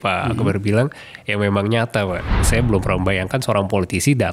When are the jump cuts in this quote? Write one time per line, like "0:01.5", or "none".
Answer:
0:02.4